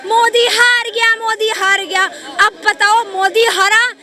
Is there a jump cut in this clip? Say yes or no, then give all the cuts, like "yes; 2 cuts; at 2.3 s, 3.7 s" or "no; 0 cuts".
no; 0 cuts